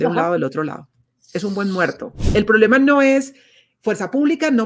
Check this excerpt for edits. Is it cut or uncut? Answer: cut